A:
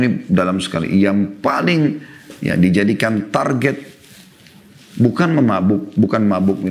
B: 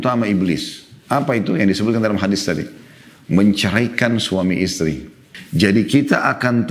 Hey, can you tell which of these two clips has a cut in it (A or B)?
B